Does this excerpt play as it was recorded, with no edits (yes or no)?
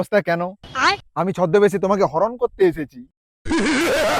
yes